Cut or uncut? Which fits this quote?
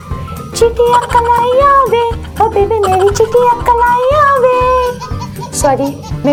uncut